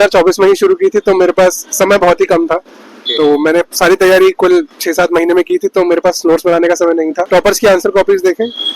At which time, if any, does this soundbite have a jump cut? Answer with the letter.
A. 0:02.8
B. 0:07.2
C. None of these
B